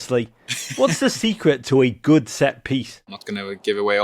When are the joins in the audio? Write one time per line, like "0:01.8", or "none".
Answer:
0:03.0